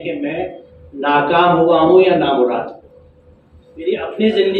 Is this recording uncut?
yes; 0 cuts

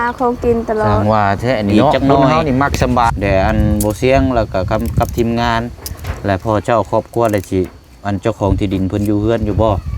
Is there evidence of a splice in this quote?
yes; 1 cut; at 3.1 s

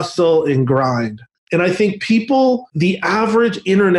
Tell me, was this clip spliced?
yes; 2 cuts; at 1.2 s, 2.7 s

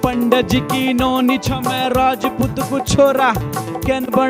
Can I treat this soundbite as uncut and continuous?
yes; 0 cuts

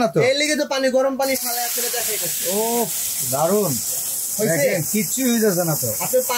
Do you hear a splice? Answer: no; 0 cuts

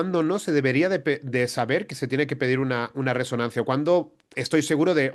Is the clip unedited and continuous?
yes; 0 cuts

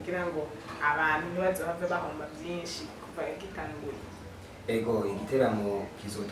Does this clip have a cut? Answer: no; 0 cuts

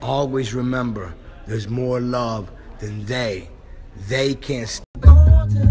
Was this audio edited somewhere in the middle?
no; 0 cuts

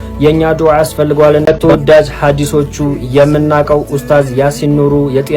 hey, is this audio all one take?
no; 1 cut; at 1.5 s

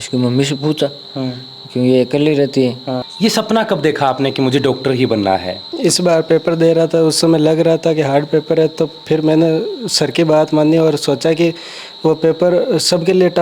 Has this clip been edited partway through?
yes; 2 cuts; at 3.1 s, 5.6 s

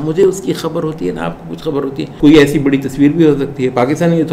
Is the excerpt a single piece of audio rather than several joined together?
no; 1 cut; at 2.1 s

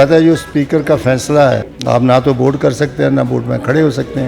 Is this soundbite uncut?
no; 1 cut; at 1.7 s

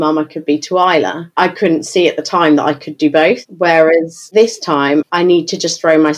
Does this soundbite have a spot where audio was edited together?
yes; 1 cut; at 5.1 s

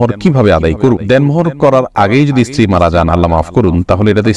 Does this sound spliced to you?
no; 0 cuts

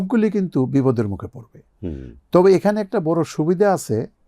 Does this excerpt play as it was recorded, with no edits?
yes; 0 cuts

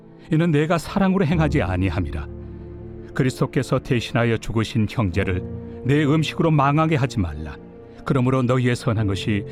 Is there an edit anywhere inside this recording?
no; 0 cuts

